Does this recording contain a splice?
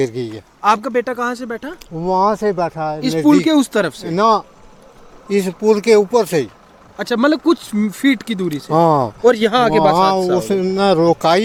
no; 0 cuts

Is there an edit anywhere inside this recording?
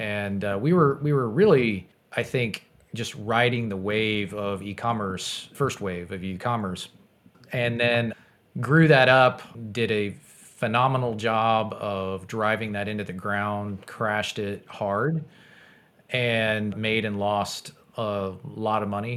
yes; 1 cut; at 2.0 s

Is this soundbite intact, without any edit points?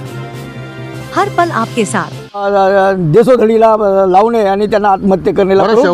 no; 1 cut; at 2.5 s

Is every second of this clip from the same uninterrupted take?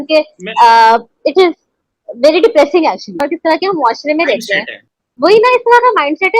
no; 1 cut; at 3.2 s

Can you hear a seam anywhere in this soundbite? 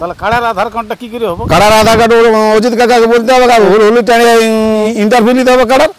yes; 2 cuts; at 3.7 s, 4.9 s

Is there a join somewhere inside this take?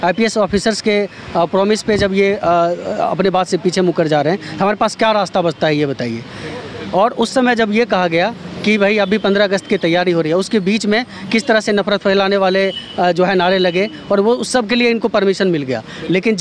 no; 0 cuts

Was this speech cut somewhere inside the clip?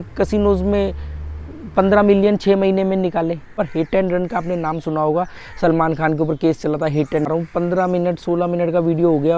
yes; 2 cuts; at 3.6 s, 7.3 s

